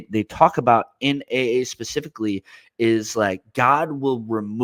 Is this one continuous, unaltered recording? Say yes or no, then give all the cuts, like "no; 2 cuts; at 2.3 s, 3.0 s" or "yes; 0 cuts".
yes; 0 cuts